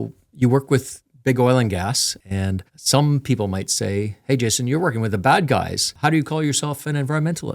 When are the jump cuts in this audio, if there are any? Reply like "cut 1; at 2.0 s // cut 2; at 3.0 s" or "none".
cut 1; at 5.8 s